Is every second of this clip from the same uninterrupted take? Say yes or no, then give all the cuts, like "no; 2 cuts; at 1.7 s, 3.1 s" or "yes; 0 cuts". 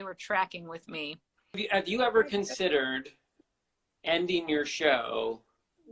no; 2 cuts; at 1.6 s, 3.3 s